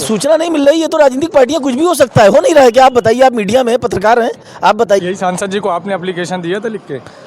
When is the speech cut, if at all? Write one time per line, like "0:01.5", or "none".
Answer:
0:05.0